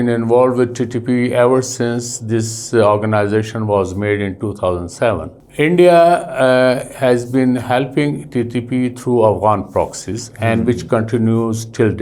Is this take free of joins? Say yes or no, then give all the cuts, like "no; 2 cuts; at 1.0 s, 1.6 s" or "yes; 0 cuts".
no; 1 cut; at 5.4 s